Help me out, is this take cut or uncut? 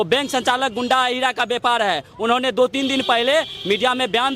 uncut